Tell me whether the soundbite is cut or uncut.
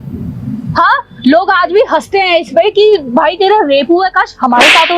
uncut